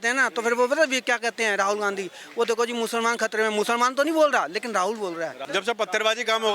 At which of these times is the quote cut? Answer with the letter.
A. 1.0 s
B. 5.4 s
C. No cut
B